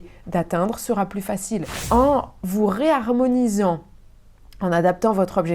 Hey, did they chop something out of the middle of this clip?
yes; 1 cut; at 1.7 s

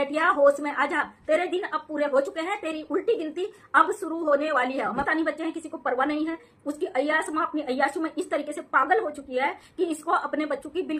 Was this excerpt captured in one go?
no; 1 cut; at 5.1 s

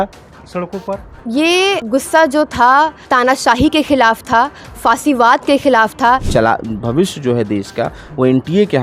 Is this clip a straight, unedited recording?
no; 4 cuts; at 1.1 s, 1.8 s, 3.0 s, 6.3 s

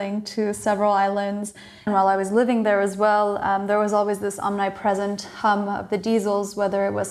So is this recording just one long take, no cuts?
no; 1 cut; at 1.9 s

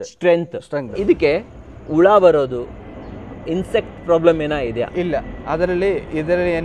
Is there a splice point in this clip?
yes; 1 cut; at 0.9 s

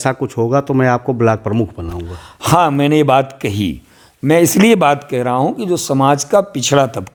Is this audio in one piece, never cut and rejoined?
yes; 0 cuts

